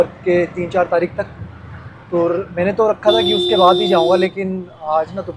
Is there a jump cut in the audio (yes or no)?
no